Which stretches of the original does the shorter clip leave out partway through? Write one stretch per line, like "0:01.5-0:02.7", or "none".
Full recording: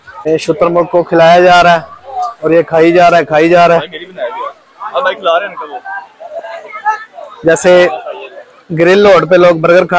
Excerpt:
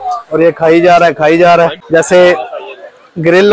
0:03.9-0:07.3

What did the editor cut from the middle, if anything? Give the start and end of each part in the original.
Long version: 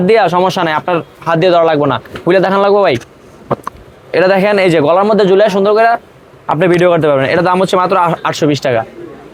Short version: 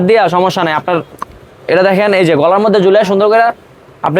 0:01.2-0:03.6

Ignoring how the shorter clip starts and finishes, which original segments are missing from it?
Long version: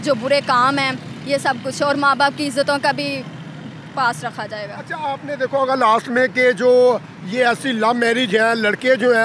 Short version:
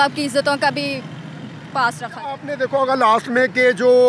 0:04.4-0:05.0

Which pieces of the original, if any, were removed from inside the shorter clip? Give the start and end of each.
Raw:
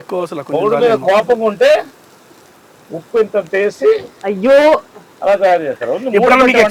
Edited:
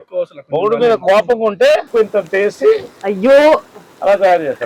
0:01.9-0:03.1

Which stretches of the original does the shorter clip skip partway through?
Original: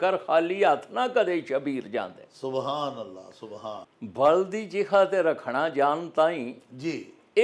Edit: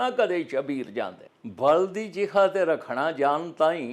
0:02.2-0:03.8

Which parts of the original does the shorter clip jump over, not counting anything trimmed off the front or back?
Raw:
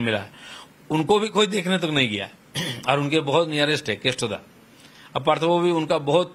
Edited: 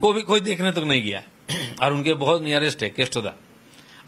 none

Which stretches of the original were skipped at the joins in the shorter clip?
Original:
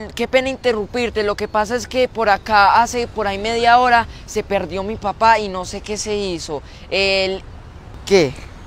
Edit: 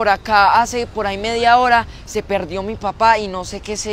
none

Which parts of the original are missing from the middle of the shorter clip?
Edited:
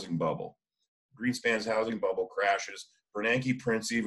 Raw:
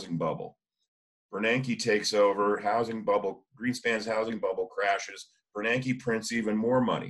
0:01.1-0:03.5

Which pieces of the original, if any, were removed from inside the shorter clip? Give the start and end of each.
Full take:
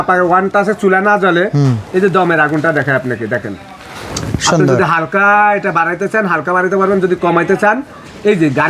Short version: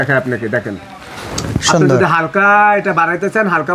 none

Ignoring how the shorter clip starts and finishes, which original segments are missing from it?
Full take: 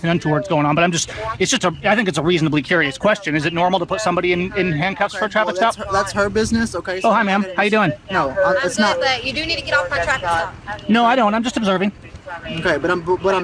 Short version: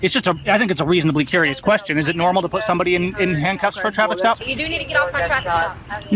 0:05.8-0:09.2

